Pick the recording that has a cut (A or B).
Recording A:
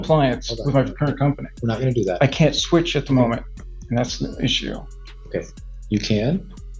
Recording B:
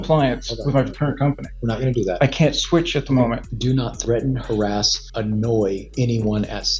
B